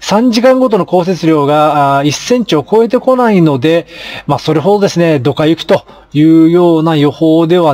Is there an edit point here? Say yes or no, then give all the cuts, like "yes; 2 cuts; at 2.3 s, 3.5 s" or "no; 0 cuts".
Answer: no; 0 cuts